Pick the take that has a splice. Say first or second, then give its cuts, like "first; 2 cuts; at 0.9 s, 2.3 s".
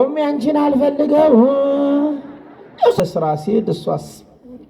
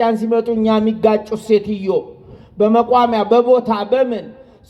first; 1 cut; at 3.0 s